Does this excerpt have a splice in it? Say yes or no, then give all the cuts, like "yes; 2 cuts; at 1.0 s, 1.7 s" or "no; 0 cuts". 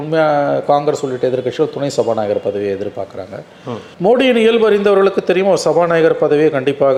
no; 0 cuts